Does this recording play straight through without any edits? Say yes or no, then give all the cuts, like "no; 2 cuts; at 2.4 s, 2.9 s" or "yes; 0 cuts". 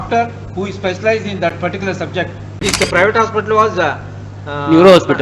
no; 1 cut; at 2.6 s